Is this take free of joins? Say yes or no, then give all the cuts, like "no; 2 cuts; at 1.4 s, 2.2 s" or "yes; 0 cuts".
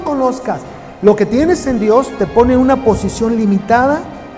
yes; 0 cuts